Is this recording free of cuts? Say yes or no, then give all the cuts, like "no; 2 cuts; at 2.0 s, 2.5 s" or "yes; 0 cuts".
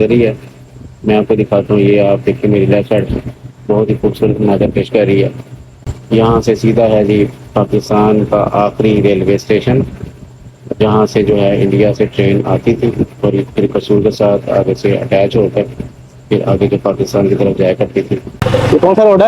no; 1 cut; at 18.3 s